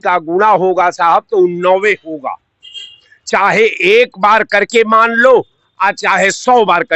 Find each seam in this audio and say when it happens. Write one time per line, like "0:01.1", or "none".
none